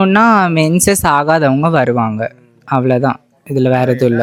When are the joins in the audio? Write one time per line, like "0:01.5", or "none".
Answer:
none